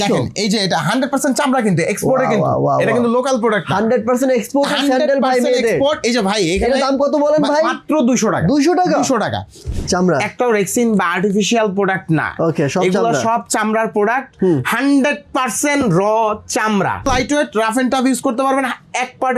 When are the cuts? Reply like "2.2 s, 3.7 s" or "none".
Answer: 9.7 s, 17.1 s